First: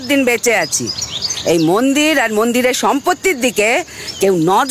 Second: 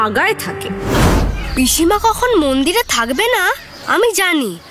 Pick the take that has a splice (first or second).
second